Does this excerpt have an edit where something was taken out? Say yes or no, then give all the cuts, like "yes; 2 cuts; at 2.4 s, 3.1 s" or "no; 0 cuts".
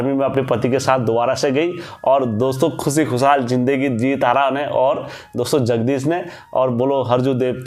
no; 0 cuts